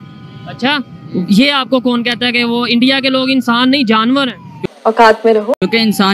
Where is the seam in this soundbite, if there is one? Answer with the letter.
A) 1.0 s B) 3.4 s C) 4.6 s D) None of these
D